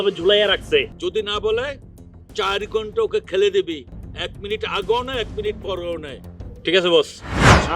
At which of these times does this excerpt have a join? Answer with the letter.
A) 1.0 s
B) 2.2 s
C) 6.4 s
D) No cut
A